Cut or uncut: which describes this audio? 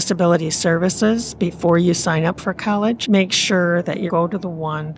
cut